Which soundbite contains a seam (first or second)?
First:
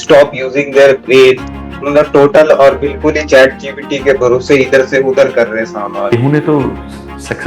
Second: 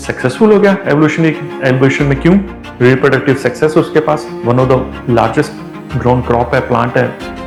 first